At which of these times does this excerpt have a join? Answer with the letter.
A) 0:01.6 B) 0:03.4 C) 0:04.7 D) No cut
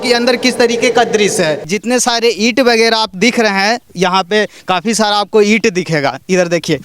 A